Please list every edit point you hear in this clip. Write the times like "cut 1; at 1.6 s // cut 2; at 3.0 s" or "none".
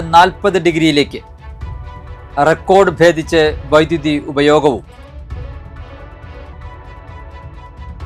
none